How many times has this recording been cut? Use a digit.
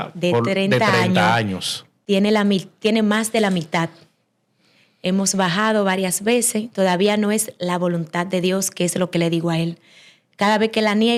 0